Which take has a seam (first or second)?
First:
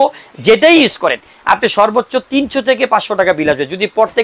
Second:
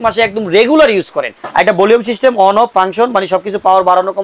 second